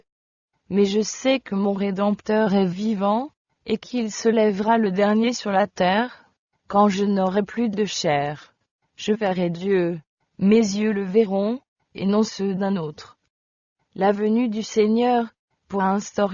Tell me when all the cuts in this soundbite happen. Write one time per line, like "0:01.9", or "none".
none